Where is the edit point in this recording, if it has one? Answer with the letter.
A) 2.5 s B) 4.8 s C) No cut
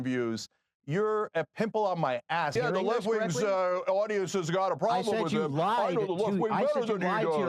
A